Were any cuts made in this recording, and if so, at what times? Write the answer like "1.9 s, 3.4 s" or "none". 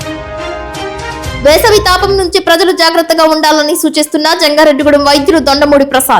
1.2 s